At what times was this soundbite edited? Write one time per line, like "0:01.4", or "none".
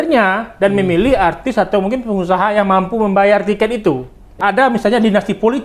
0:04.4

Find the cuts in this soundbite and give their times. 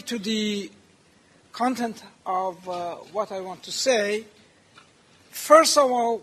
0:02.1

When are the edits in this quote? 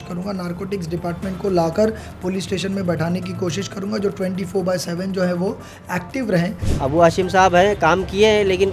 0:06.6

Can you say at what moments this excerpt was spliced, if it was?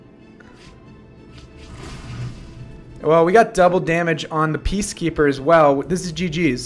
none

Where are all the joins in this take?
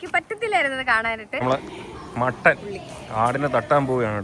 0:01.3

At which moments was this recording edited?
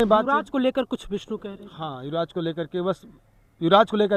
none

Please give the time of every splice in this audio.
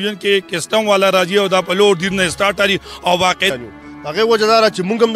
0:03.5

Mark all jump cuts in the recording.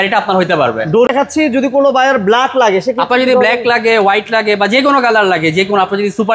0:01.1

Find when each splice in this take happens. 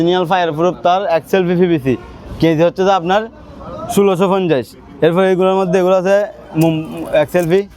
none

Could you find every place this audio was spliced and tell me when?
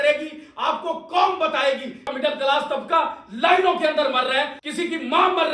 0:02.1

